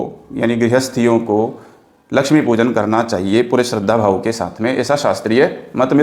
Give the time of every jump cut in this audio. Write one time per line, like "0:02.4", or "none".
none